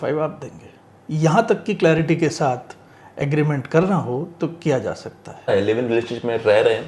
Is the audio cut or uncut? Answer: cut